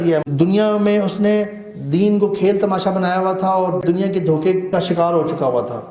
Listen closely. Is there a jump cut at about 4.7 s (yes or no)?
yes